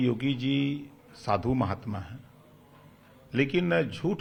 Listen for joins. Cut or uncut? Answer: uncut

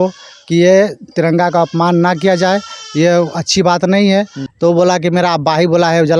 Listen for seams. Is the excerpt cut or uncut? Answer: cut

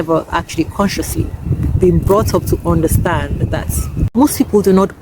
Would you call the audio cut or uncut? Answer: cut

